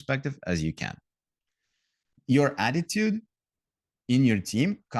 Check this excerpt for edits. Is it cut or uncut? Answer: cut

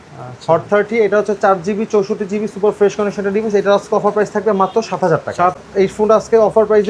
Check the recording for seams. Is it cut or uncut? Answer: cut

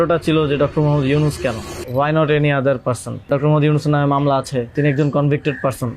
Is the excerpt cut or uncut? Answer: cut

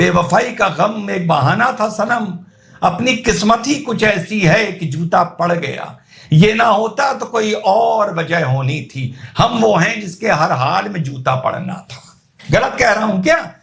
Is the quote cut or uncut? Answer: uncut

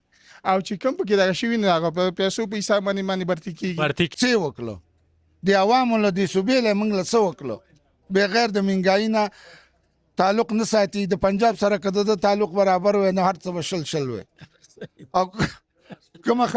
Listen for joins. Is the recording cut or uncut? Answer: cut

